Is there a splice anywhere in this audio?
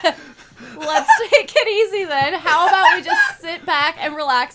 no; 0 cuts

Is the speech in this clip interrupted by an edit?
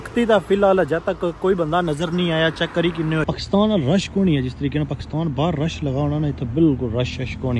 yes; 1 cut; at 3.2 s

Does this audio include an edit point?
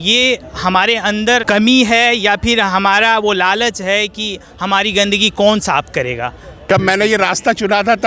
yes; 2 cuts; at 1.4 s, 6.6 s

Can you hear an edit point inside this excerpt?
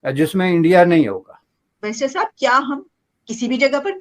yes; 1 cut; at 1.5 s

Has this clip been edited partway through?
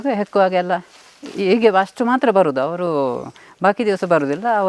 no; 0 cuts

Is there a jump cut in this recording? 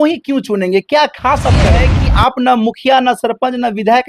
yes; 1 cut; at 1.9 s

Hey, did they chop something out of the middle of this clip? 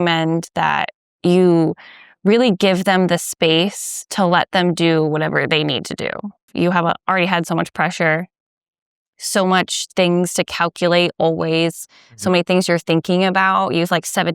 yes; 2 cuts; at 1.0 s, 6.5 s

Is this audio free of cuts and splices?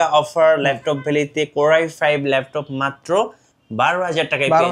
yes; 0 cuts

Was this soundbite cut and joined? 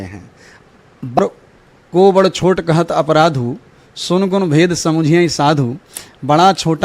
yes; 1 cut; at 1.2 s

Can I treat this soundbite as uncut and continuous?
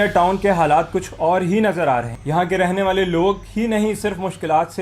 no; 1 cut; at 2.2 s

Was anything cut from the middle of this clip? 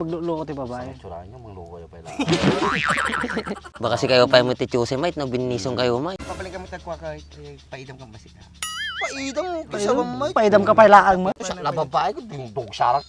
yes; 3 cuts; at 3.7 s, 6.1 s, 11.5 s

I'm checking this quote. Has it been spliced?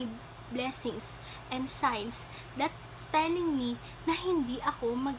no; 0 cuts

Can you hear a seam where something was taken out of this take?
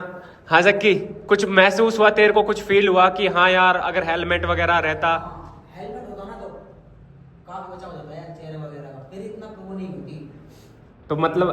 no; 0 cuts

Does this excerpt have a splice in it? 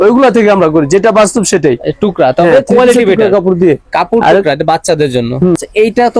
no; 0 cuts

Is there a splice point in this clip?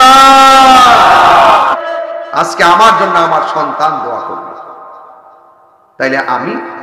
yes; 1 cut; at 1.7 s

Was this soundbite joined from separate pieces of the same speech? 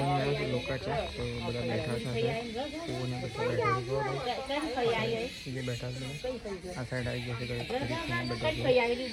no; 0 cuts

